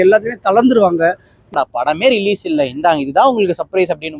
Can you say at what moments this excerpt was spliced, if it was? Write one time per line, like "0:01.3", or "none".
0:01.5